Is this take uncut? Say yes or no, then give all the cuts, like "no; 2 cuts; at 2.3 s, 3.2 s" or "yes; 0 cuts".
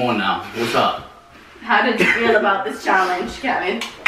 yes; 0 cuts